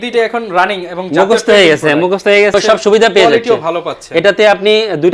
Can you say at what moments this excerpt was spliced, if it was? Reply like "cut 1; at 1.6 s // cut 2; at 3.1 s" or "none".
cut 1; at 2.5 s